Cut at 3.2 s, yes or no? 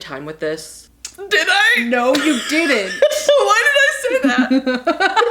no